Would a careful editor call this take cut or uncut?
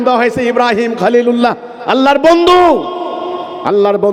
uncut